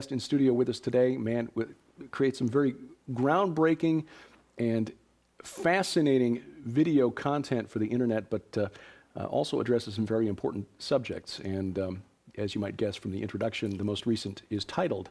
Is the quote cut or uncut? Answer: cut